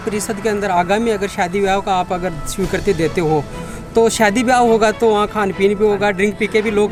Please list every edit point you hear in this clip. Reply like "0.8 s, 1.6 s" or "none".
none